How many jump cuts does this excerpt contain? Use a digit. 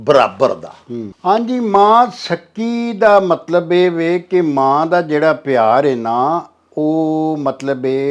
0